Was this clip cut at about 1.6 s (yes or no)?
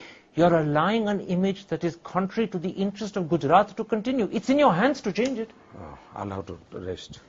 no